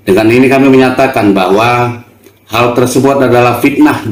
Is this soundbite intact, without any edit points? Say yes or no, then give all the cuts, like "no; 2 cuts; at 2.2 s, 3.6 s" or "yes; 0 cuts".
yes; 0 cuts